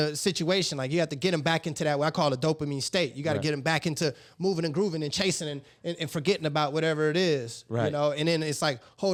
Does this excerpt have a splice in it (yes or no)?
no